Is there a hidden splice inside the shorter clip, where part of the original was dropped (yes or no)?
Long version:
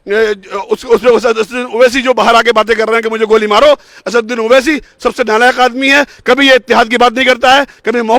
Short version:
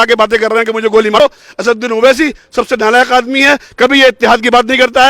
yes